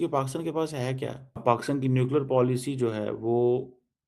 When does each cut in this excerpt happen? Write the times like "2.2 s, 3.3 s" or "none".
1.4 s